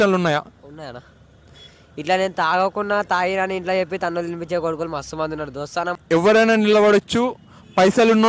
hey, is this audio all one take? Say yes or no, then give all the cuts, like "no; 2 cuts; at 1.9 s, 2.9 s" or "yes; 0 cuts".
no; 1 cut; at 6.0 s